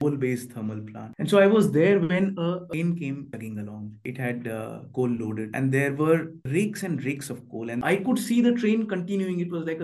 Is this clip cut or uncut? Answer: cut